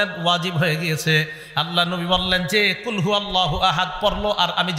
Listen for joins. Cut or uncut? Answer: uncut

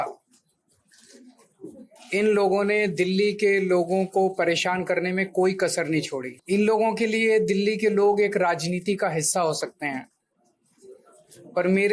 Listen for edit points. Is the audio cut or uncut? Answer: cut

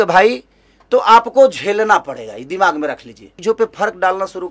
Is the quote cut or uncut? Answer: cut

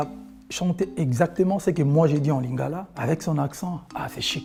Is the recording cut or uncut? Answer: uncut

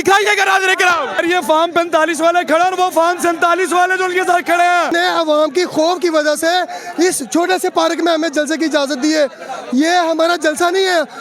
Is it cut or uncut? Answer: cut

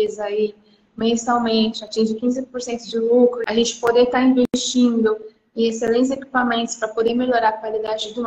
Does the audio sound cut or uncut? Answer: cut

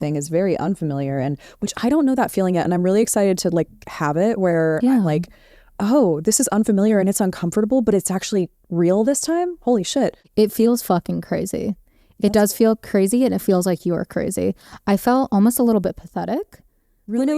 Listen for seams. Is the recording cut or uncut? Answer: cut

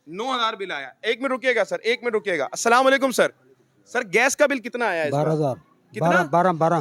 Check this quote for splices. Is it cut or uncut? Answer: uncut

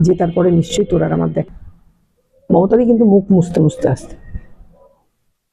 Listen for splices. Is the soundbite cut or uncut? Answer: cut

